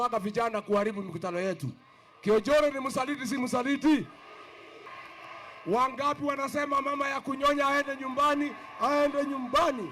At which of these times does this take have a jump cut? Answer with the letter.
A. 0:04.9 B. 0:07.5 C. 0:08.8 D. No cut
A